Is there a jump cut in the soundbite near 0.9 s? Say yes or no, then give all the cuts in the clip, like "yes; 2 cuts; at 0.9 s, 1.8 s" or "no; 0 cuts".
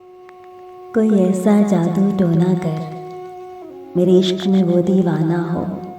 yes; 1 cut; at 0.9 s